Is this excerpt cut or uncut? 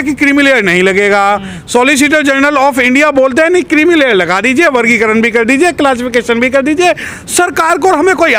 uncut